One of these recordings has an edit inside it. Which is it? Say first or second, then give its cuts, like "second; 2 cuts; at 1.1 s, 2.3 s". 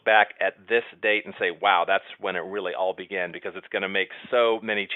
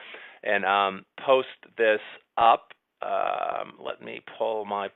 first; 1 cut; at 2.3 s